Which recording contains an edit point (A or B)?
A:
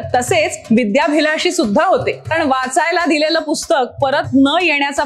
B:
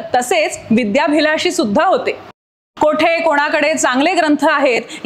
A